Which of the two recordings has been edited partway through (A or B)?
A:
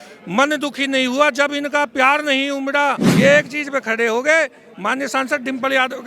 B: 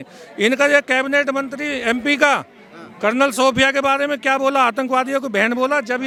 A